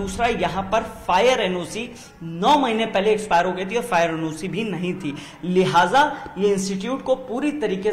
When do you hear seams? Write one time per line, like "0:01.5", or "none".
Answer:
none